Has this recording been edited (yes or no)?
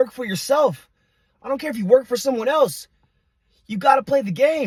no